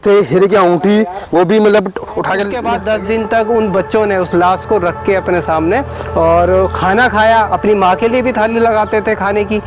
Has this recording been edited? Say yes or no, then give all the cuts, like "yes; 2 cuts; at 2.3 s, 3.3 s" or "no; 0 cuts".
yes; 1 cut; at 2.6 s